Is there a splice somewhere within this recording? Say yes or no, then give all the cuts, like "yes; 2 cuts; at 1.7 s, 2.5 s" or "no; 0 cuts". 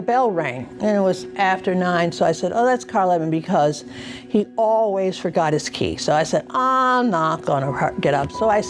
no; 0 cuts